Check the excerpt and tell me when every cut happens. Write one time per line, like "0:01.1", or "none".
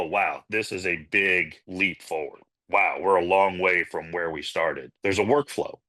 0:02.4
0:04.9